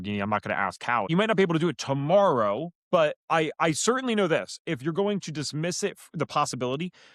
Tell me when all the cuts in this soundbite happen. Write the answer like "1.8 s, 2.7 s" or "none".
1.1 s